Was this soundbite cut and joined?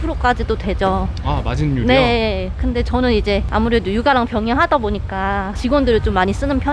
no; 0 cuts

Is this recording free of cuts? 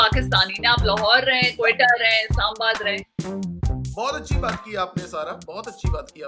yes; 0 cuts

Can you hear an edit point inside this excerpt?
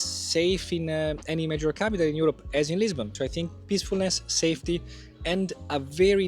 no; 0 cuts

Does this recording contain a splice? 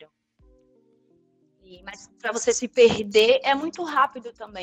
no; 0 cuts

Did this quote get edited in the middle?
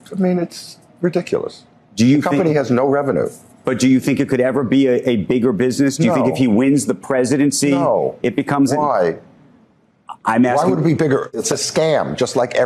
yes; 1 cut; at 11.3 s

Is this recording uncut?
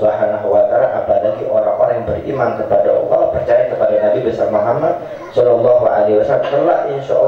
yes; 0 cuts

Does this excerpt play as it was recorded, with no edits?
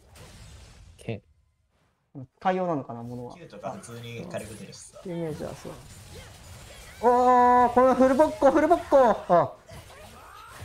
no; 1 cut; at 3.5 s

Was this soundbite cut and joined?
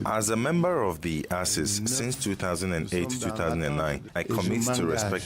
yes; 1 cut; at 4.2 s

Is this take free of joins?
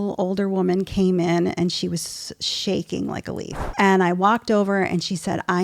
no; 1 cut; at 3.6 s

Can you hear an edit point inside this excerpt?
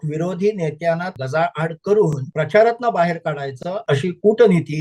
yes; 3 cuts; at 1.2 s, 2.2 s, 3.7 s

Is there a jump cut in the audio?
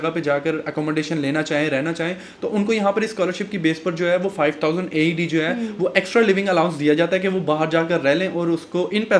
no; 0 cuts

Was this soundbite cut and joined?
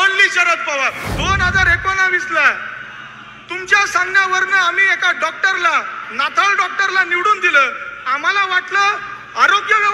yes; 1 cut; at 1.0 s

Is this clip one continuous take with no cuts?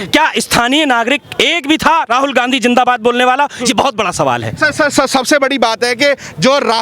yes; 0 cuts

